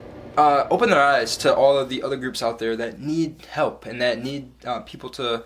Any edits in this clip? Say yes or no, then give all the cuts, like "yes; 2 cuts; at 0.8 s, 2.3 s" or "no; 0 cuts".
no; 0 cuts